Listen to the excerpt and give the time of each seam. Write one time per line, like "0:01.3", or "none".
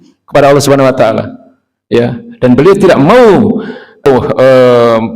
0:04.1

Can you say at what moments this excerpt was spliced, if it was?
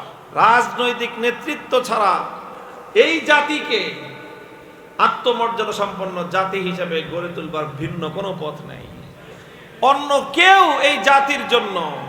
none

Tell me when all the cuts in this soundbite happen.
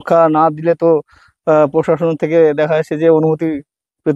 none

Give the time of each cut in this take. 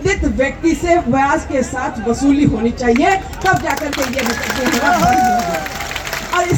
none

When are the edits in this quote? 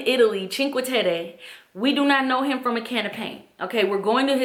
none

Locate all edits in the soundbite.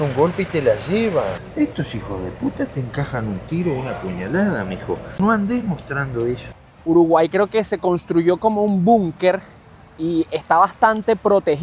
0:01.4
0:05.2
0:06.5

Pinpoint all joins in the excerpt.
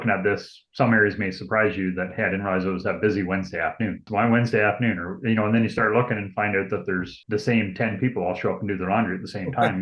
0:04.0

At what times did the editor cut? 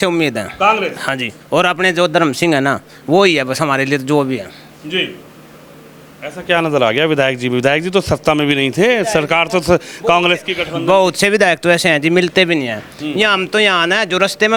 none

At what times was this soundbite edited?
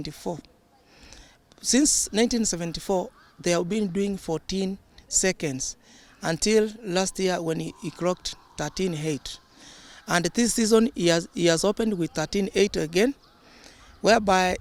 none

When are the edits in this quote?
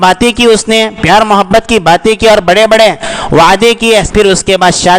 0:04.1

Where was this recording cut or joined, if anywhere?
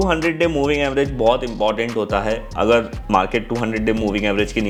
none

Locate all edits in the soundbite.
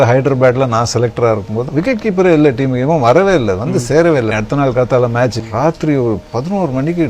0:01.6
0:04.3
0:05.4

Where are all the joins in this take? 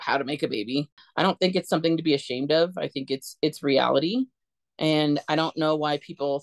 0:01.0

